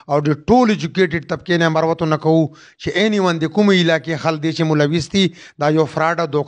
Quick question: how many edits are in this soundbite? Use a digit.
0